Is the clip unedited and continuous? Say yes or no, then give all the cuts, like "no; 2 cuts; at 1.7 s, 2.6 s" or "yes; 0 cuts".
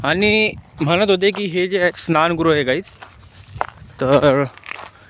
yes; 0 cuts